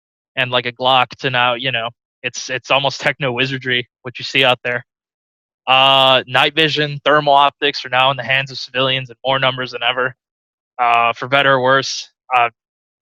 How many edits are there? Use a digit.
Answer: 0